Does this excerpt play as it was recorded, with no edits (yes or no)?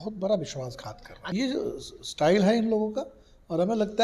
no